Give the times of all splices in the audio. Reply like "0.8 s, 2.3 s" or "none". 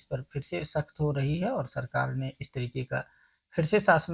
none